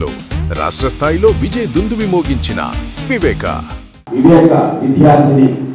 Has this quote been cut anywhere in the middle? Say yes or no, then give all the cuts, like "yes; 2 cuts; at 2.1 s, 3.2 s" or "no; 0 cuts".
no; 0 cuts